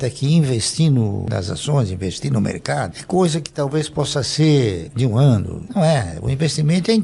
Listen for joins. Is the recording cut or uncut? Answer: uncut